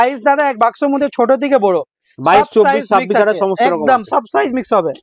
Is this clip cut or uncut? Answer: uncut